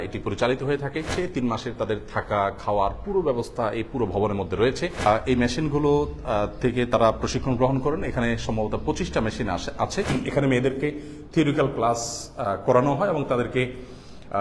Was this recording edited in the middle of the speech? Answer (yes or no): yes